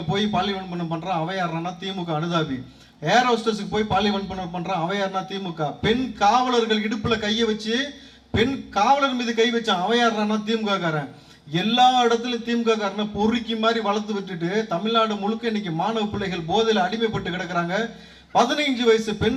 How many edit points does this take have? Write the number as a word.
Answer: zero